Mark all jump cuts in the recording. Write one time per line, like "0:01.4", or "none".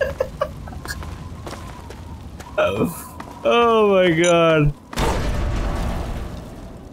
none